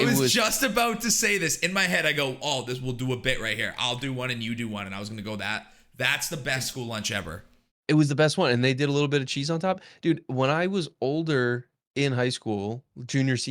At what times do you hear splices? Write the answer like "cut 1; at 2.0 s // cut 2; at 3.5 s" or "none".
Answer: cut 1; at 6.7 s